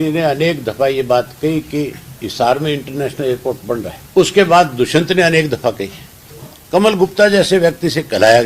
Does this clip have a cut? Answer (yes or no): yes